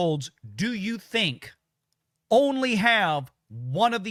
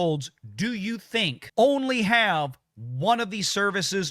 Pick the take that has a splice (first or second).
second